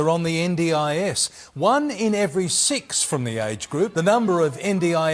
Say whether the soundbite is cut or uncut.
cut